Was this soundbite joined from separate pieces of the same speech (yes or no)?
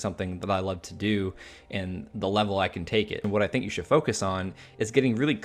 yes